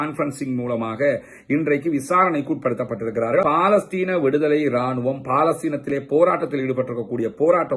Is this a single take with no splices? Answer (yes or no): no